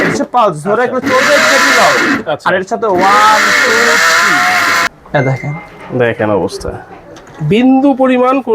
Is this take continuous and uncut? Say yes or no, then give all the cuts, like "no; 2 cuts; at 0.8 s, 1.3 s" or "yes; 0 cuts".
no; 1 cut; at 4.9 s